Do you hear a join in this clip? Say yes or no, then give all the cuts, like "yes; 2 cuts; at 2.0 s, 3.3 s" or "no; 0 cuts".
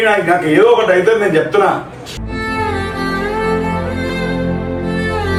no; 0 cuts